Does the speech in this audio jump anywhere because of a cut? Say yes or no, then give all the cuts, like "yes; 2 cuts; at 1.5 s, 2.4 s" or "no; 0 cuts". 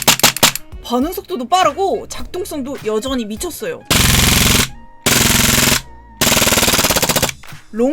yes; 1 cut; at 3.8 s